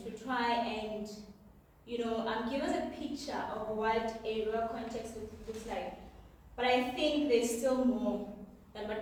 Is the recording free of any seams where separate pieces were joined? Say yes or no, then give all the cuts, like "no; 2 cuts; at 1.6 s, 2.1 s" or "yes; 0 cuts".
yes; 0 cuts